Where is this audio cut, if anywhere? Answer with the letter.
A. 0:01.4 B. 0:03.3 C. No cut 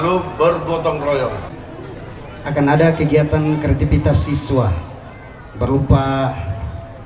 A